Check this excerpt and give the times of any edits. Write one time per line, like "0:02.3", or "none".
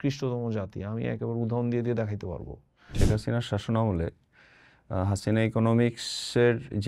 0:02.9